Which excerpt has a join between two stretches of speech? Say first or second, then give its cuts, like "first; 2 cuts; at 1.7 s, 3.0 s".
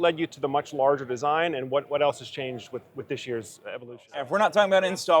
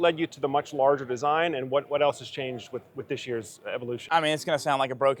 first; 1 cut; at 4.0 s